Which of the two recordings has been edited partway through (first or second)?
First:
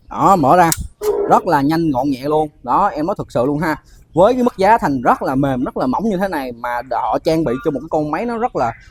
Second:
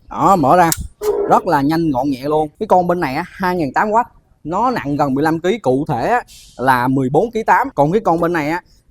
second